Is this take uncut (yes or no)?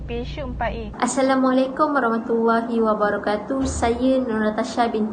no